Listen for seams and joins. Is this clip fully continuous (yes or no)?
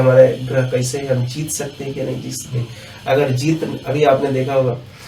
yes